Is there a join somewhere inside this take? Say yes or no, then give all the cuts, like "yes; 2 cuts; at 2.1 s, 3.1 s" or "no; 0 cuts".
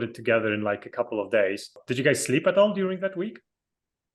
yes; 1 cut; at 1.8 s